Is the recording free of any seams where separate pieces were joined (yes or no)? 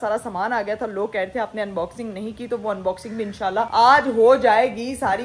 yes